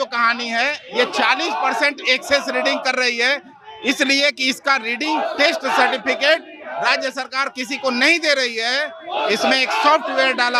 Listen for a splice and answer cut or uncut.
uncut